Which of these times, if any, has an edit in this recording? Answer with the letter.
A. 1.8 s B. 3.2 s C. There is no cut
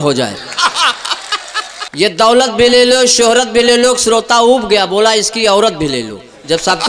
A